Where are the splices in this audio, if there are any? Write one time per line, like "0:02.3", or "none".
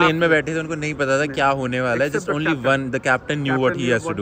none